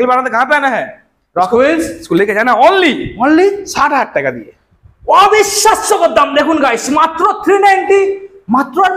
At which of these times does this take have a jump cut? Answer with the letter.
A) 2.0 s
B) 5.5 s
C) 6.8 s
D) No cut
D